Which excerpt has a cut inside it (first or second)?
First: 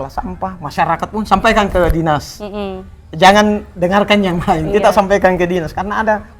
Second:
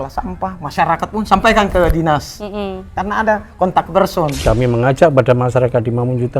second